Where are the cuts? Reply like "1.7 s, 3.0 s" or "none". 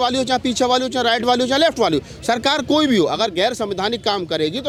none